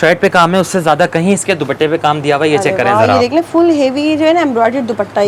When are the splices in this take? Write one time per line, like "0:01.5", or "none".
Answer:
none